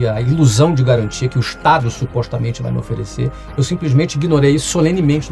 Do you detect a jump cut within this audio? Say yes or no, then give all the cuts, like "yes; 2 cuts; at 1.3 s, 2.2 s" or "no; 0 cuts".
no; 0 cuts